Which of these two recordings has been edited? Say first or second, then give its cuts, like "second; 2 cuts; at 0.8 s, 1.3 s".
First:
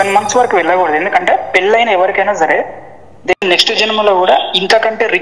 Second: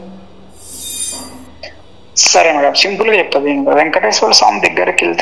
first; 1 cut; at 3.3 s